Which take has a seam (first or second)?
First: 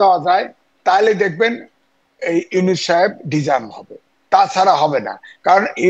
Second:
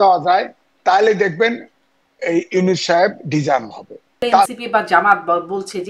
second